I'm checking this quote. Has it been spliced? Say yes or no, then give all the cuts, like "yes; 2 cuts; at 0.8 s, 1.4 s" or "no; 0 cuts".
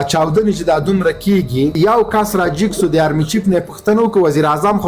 yes; 1 cut; at 1.7 s